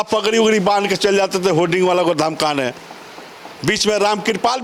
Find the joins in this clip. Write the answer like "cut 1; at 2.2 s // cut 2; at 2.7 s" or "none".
none